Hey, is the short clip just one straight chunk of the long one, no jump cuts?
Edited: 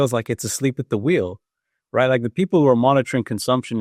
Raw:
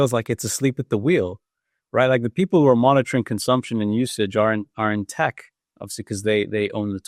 yes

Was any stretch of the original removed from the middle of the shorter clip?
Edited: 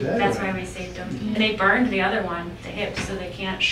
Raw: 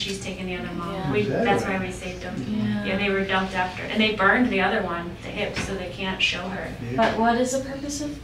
yes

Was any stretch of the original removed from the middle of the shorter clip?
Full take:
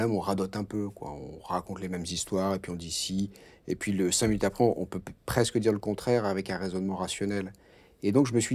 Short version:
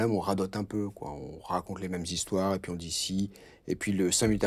no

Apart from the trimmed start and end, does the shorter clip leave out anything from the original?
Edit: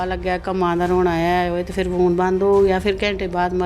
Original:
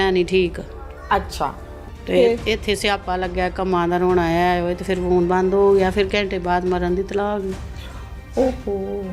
no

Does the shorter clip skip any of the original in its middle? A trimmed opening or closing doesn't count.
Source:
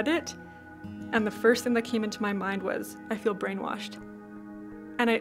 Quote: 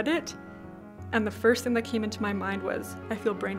no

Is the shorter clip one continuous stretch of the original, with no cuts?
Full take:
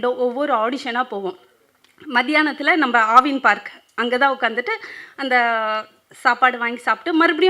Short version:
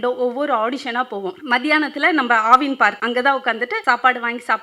no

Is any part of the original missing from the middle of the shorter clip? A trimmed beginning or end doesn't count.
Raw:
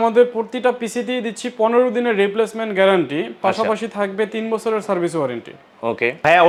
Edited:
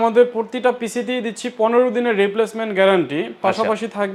no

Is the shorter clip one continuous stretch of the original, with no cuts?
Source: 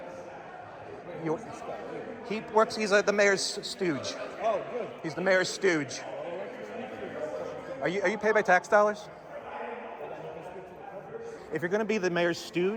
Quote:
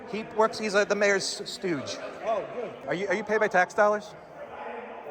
no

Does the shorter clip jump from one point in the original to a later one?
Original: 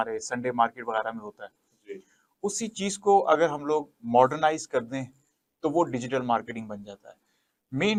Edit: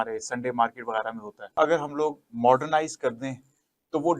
yes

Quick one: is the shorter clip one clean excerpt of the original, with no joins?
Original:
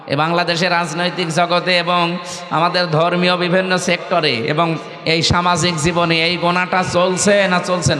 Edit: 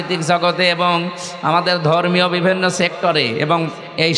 yes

